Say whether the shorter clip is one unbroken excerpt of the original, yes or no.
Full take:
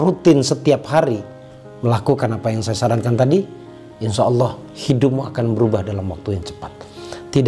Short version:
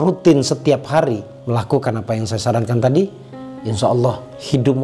no